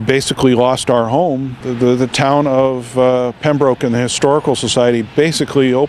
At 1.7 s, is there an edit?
yes; 1 cut; at 1.7 s

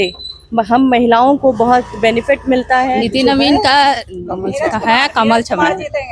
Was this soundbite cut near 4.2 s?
no; 1 cut; at 3.0 s

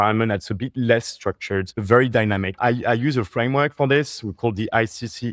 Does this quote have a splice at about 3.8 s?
no; 2 cuts; at 1.7 s, 2.5 s

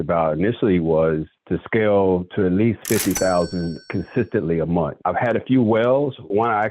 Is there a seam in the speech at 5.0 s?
yes; 1 cut; at 5.0 s

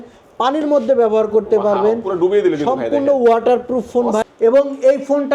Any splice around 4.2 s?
yes; 1 cut; at 4.2 s

